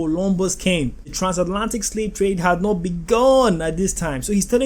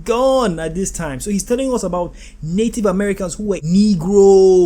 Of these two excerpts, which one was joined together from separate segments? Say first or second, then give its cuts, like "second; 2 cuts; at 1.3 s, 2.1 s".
second; 1 cut; at 3.6 s